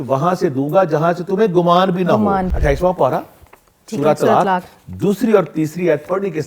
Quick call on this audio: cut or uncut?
uncut